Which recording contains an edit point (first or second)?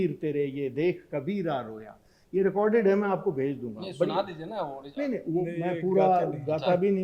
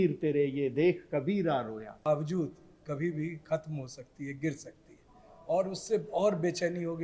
second